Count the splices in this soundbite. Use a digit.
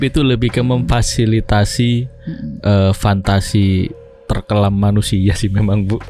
0